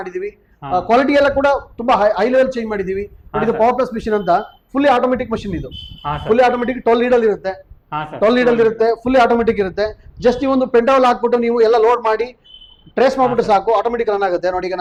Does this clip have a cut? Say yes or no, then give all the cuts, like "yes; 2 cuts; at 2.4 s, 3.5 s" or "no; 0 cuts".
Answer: no; 0 cuts